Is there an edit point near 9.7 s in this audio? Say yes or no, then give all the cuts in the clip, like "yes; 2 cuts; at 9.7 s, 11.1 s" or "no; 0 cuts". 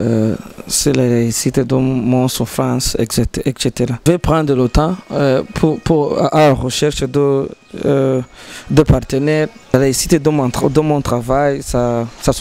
yes; 2 cuts; at 4.0 s, 9.7 s